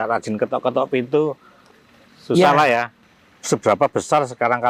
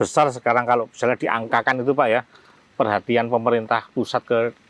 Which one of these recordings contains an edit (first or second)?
first